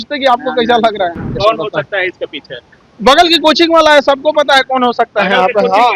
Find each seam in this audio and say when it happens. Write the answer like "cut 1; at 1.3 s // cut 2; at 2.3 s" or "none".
cut 1; at 1.3 s